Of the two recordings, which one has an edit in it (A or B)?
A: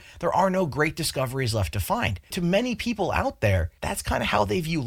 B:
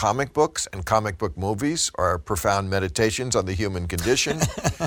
A